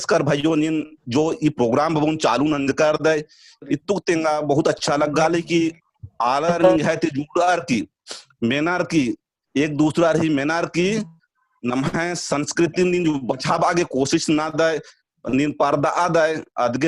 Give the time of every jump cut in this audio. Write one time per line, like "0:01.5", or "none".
none